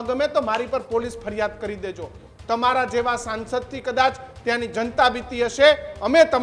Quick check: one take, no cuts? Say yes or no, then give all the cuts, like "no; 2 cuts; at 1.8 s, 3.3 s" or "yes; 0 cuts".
yes; 0 cuts